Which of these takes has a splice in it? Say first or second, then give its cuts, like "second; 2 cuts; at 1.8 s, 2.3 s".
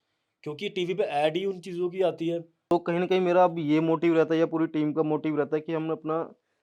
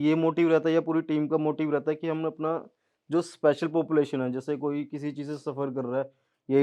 first; 1 cut; at 2.5 s